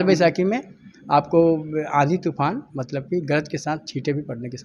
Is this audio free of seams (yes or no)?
yes